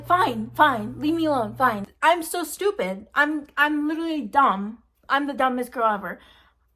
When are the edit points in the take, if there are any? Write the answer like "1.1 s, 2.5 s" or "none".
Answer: 1.9 s